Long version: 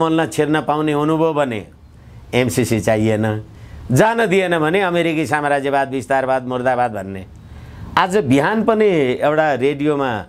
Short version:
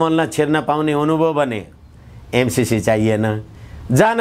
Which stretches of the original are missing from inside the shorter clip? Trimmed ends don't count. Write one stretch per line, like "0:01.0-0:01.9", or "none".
none